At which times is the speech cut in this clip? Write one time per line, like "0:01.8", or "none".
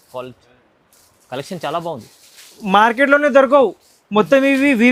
none